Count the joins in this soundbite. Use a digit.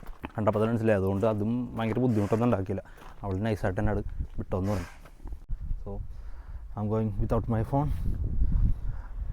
1